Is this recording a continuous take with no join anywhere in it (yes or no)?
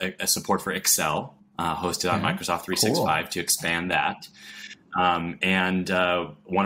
yes